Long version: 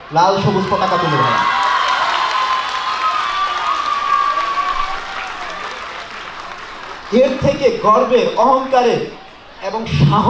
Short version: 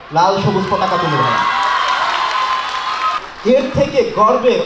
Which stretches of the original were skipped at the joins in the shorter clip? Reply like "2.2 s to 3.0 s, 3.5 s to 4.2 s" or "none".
3.2 s to 6.9 s